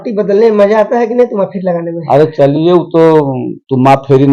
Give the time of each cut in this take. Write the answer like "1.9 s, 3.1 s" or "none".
none